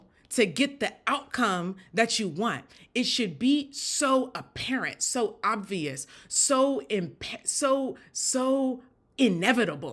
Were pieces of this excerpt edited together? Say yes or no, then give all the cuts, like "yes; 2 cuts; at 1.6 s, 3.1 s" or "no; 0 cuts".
no; 0 cuts